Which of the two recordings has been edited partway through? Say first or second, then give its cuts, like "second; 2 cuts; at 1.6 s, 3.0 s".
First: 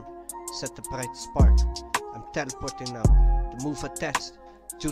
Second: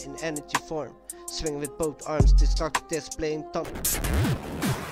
second; 1 cut; at 3.7 s